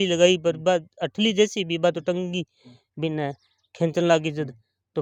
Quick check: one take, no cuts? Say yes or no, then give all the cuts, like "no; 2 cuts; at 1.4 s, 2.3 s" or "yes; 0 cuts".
yes; 0 cuts